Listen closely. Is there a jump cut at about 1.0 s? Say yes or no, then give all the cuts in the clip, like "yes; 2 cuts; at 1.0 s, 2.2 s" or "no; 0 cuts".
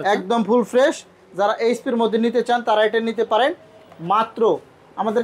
no; 0 cuts